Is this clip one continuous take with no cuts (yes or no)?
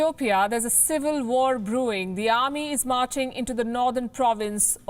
yes